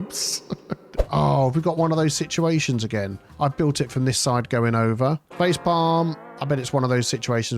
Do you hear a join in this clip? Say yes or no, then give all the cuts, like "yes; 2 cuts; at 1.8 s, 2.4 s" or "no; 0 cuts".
yes; 1 cut; at 1.0 s